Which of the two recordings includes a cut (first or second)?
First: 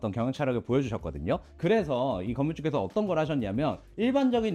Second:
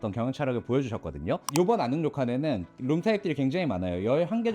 second